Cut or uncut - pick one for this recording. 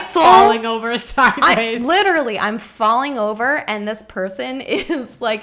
uncut